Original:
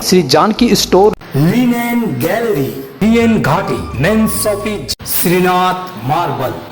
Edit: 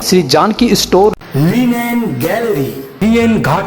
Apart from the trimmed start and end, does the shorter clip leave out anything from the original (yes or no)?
no